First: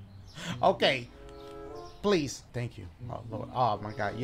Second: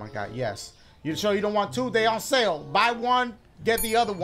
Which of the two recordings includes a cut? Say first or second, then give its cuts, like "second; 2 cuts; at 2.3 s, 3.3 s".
first; 1 cut; at 2.4 s